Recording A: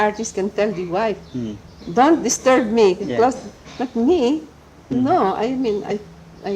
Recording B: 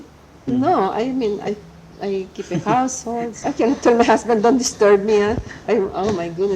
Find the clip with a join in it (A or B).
B